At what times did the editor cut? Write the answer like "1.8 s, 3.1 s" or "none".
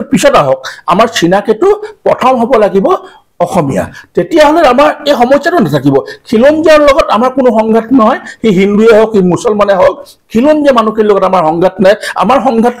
none